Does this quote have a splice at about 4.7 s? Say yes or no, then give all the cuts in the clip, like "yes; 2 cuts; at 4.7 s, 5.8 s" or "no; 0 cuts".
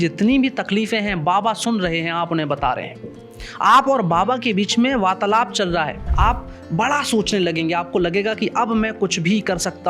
no; 1 cut; at 6.0 s